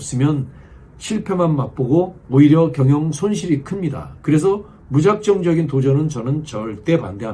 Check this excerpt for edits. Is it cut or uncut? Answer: uncut